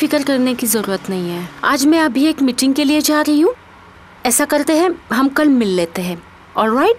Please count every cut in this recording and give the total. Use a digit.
1